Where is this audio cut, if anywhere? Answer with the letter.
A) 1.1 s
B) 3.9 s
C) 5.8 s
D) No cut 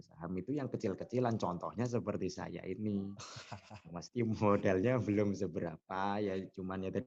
D